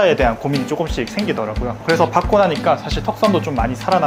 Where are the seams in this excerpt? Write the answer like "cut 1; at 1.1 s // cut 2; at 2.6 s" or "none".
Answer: cut 1; at 1.8 s